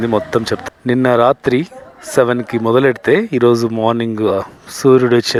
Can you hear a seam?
no; 0 cuts

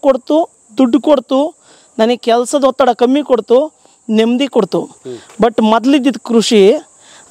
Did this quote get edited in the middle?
no; 0 cuts

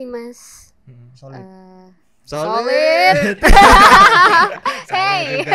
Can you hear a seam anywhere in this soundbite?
no; 0 cuts

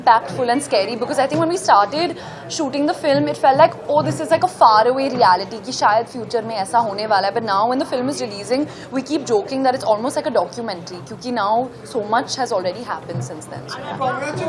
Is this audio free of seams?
yes; 0 cuts

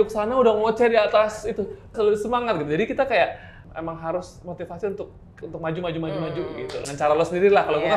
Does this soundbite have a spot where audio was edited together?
yes; 3 cuts; at 1.9 s, 5.4 s, 6.8 s

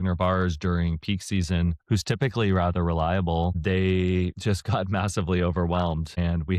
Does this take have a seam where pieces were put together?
no; 0 cuts

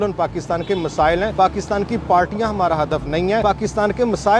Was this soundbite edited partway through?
yes; 2 cuts; at 1.3 s, 3.4 s

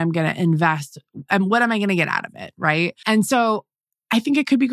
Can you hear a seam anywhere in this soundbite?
yes; 1 cut; at 3.0 s

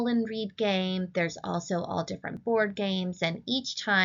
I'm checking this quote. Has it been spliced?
yes; 1 cut; at 3.1 s

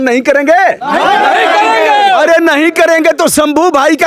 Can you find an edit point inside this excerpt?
no; 0 cuts

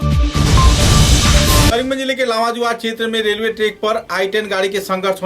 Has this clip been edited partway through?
yes; 1 cut; at 1.6 s

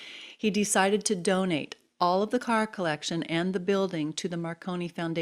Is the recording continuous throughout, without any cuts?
yes; 0 cuts

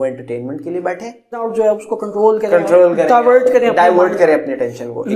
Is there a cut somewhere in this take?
yes; 1 cut; at 1.4 s

